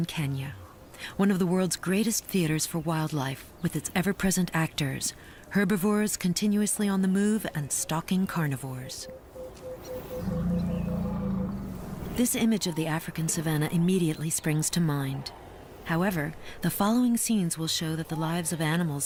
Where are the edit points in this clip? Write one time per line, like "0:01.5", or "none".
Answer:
none

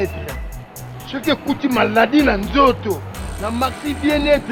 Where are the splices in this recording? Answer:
none

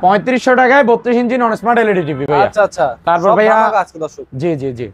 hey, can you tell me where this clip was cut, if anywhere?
none

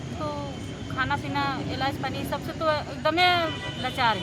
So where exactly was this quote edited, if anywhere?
none

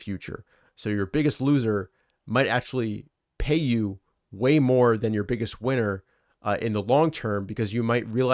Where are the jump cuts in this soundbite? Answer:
none

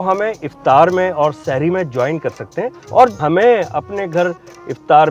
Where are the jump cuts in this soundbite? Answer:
0:03.0

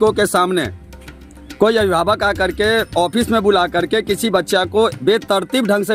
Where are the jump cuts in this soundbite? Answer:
none

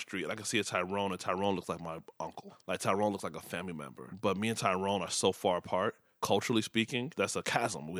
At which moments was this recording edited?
none

